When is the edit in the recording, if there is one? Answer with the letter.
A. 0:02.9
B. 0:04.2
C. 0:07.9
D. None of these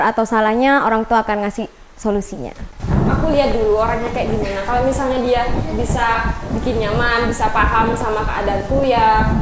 A